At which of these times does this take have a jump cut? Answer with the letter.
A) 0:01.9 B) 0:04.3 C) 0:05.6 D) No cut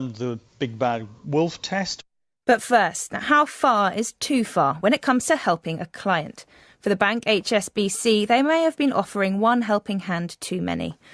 A